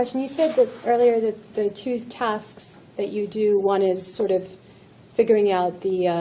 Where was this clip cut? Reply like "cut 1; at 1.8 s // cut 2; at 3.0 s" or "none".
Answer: none